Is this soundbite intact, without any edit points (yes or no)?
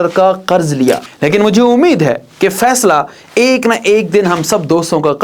no